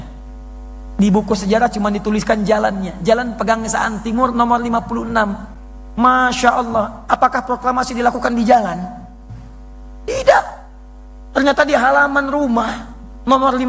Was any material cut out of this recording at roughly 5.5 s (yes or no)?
no